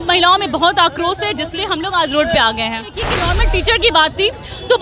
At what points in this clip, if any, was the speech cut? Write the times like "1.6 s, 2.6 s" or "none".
2.9 s